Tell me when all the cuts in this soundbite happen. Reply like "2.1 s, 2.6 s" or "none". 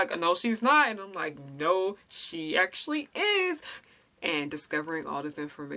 3.8 s